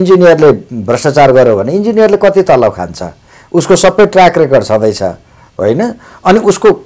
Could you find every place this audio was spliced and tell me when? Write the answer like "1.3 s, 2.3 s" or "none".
none